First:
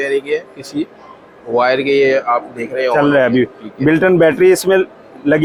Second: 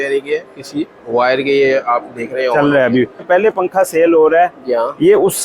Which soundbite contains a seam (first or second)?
second